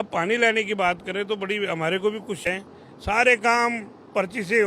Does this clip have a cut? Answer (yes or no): yes